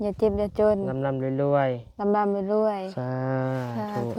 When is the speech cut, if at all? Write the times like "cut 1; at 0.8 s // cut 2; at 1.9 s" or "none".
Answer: none